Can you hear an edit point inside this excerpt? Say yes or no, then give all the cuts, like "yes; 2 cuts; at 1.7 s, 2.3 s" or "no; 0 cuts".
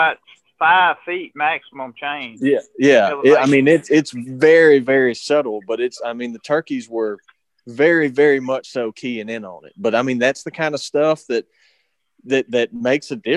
no; 0 cuts